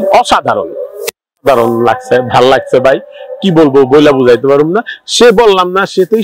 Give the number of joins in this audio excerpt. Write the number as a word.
zero